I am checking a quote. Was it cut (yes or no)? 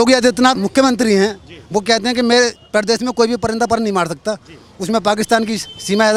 no